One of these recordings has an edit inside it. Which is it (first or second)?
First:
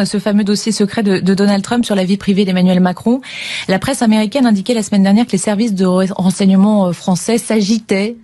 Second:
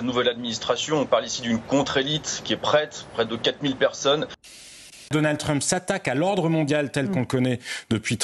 second